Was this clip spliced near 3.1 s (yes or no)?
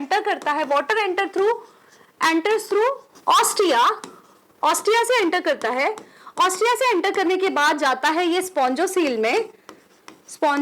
yes